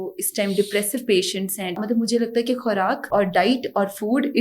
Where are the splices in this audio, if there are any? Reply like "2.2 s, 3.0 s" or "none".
1.8 s, 3.1 s